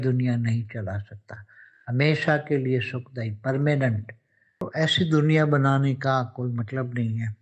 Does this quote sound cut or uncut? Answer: cut